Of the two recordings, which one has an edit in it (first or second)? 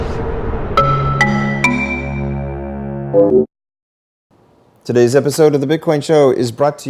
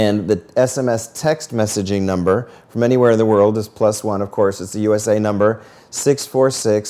second